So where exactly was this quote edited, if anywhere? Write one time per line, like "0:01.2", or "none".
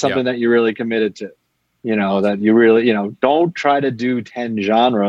none

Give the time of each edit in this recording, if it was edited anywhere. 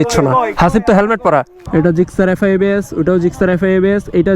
0:01.6

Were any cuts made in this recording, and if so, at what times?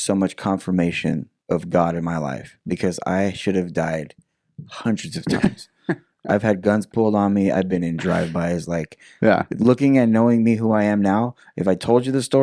0:01.3

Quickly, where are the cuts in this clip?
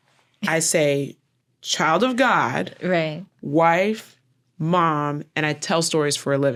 none

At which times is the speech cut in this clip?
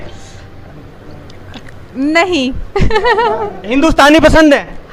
none

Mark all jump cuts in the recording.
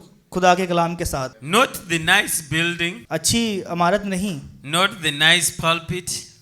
0:01.4
0:03.0

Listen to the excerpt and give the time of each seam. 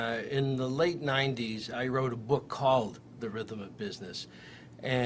none

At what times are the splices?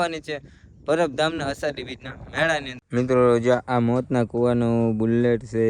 0:02.8

